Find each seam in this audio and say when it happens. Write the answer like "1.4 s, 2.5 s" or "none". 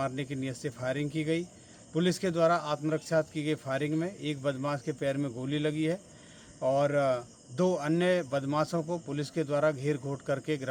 none